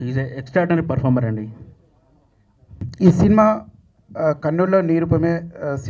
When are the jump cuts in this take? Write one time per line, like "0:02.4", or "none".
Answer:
none